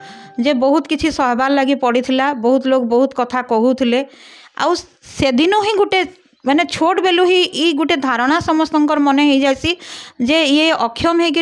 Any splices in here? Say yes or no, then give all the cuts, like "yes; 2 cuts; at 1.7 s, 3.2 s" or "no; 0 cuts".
no; 0 cuts